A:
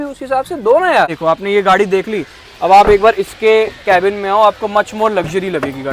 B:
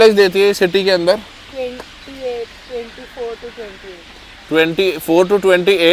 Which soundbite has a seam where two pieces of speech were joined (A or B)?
A